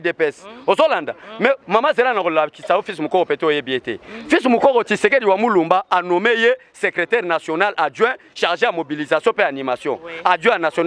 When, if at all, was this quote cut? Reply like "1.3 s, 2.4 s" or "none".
none